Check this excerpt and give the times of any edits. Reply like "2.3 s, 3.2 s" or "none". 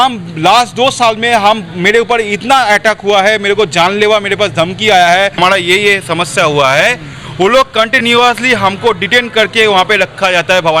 5.4 s